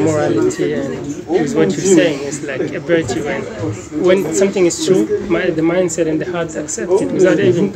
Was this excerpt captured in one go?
yes; 0 cuts

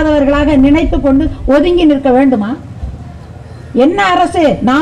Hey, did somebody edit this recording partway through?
no; 0 cuts

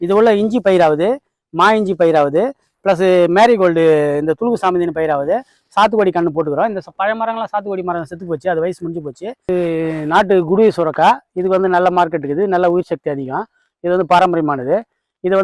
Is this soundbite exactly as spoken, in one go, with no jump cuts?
no; 1 cut; at 9.5 s

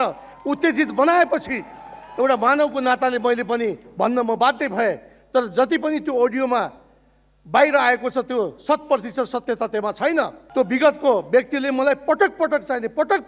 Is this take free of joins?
no; 1 cut; at 10.4 s

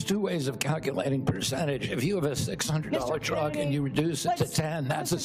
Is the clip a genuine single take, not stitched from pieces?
yes; 0 cuts

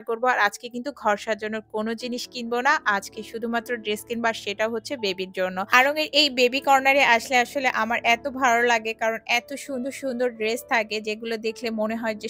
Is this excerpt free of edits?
yes; 0 cuts

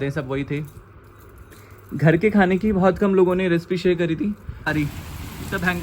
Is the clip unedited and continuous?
no; 1 cut; at 4.7 s

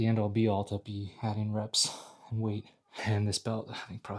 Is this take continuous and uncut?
no; 1 cut; at 2.8 s

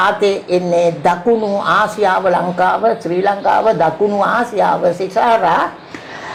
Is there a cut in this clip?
no; 0 cuts

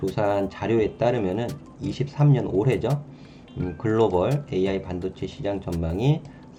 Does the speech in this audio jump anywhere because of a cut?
no; 0 cuts

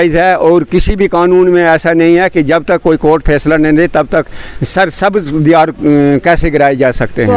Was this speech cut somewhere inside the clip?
no; 0 cuts

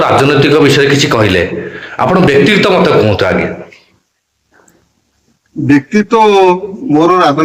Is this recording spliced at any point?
no; 0 cuts

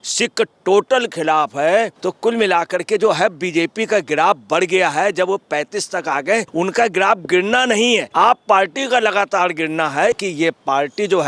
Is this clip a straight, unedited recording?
no; 4 cuts; at 2.0 s, 6.5 s, 8.1 s, 10.2 s

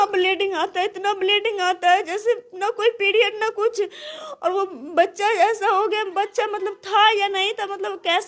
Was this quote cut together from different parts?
no; 0 cuts

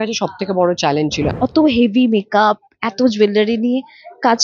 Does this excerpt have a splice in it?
yes; 1 cut; at 1.3 s

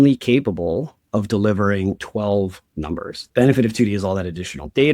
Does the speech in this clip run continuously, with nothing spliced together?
no; 2 cuts; at 2.0 s, 3.2 s

